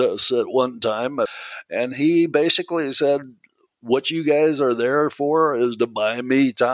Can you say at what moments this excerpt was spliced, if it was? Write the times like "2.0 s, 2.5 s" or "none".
1.4 s